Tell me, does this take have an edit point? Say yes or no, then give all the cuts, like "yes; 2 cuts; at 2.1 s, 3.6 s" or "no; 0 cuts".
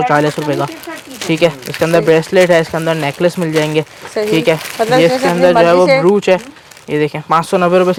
no; 0 cuts